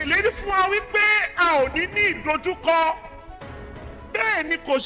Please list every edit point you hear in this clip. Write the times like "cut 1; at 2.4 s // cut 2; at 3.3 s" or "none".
none